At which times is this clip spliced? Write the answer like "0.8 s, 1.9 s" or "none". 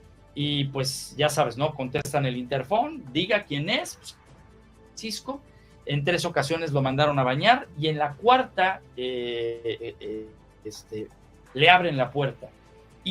none